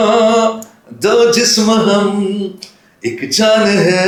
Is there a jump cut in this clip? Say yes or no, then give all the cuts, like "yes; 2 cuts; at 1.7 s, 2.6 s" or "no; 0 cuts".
no; 0 cuts